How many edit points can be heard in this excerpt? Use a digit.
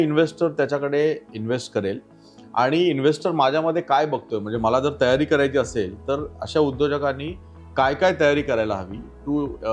0